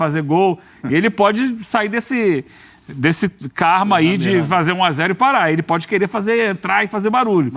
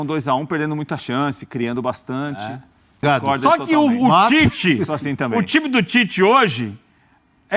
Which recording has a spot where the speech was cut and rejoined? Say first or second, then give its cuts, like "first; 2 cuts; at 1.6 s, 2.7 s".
second; 1 cut; at 3.0 s